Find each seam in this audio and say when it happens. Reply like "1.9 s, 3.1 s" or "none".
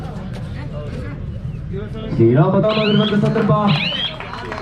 2.6 s